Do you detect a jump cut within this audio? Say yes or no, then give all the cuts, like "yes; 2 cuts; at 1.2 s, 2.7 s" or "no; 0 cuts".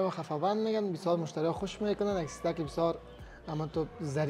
no; 0 cuts